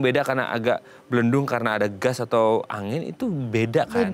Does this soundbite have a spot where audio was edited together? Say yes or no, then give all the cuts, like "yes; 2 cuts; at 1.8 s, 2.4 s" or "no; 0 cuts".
no; 0 cuts